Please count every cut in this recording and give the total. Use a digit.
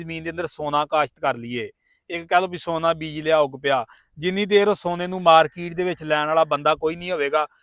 0